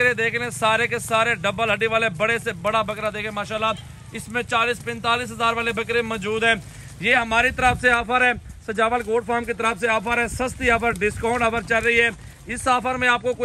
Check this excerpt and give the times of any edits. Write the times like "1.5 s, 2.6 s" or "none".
none